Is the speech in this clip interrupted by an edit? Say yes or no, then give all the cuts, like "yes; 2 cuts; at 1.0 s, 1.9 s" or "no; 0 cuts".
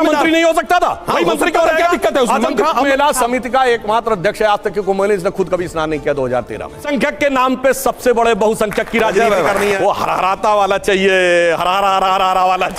yes; 3 cuts; at 2.9 s, 6.8 s, 9.8 s